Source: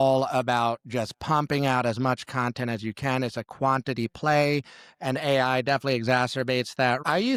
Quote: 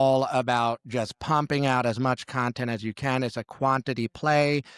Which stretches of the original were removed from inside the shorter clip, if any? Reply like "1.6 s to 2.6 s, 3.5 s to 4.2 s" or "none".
none